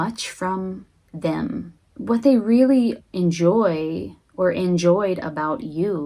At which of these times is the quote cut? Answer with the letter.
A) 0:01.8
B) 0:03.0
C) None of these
A